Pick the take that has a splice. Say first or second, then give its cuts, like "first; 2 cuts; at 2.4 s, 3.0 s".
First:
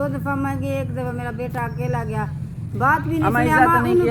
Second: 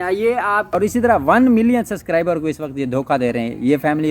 second; 1 cut; at 0.9 s